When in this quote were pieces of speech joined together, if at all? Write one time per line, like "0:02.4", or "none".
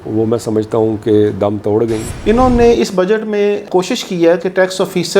0:02.1
0:03.6